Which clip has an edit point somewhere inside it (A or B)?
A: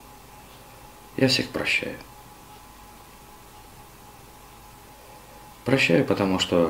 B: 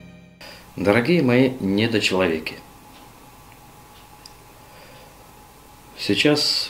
A